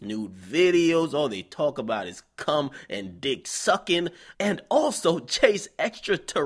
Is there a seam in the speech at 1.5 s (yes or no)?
no